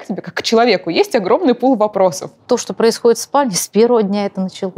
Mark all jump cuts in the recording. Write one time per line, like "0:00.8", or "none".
0:02.4